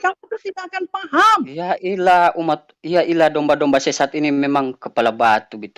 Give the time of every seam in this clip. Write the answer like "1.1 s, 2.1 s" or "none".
none